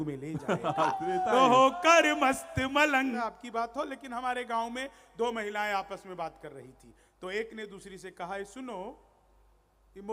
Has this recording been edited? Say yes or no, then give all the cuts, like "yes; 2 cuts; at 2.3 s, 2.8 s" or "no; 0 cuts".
yes; 1 cut; at 3.2 s